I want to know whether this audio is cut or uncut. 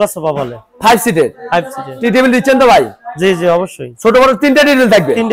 uncut